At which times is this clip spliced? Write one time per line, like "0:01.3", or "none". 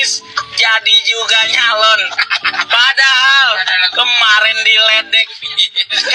none